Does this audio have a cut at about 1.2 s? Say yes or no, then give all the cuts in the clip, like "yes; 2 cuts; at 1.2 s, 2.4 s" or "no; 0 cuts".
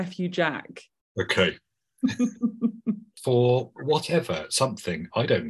no; 1 cut; at 3.1 s